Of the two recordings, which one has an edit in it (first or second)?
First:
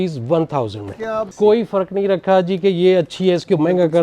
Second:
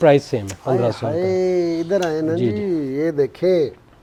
first